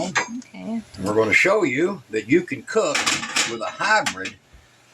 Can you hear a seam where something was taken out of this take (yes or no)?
yes